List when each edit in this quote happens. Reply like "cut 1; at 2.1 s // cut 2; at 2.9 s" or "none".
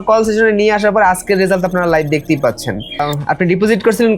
cut 1; at 3.1 s